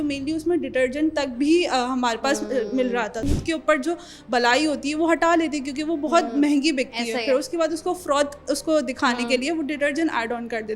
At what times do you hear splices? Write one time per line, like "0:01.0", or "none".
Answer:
0:03.5